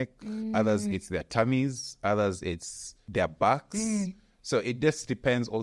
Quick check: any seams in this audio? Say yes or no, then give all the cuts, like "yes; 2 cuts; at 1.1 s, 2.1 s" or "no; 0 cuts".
no; 0 cuts